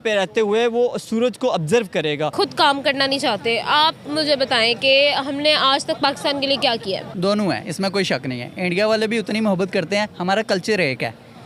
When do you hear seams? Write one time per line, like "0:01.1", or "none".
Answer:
0:02.3
0:07.1